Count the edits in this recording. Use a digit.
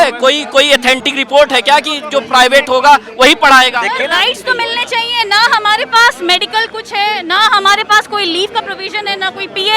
1